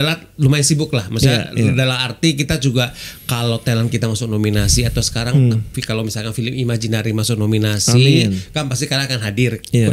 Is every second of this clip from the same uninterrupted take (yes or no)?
yes